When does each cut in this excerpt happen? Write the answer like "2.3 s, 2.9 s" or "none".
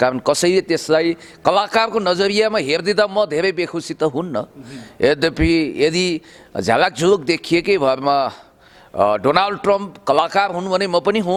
none